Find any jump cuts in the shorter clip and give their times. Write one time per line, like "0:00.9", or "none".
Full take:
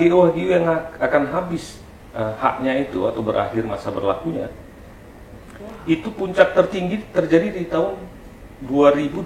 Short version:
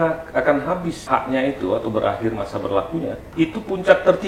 0:01.0
0:03.2